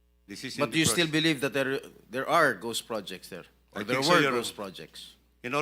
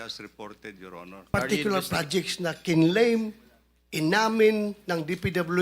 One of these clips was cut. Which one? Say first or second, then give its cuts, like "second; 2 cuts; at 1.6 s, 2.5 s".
second; 1 cut; at 1.3 s